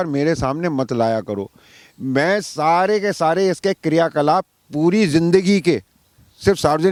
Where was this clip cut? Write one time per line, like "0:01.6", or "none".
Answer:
none